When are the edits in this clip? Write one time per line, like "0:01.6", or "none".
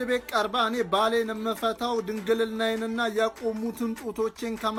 none

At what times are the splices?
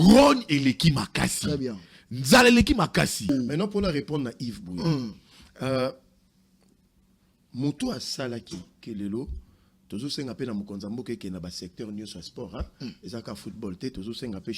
0:03.3

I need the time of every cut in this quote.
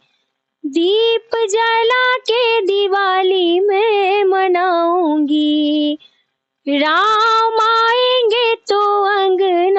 none

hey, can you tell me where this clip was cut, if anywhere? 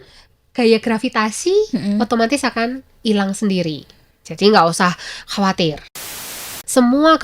0:06.3

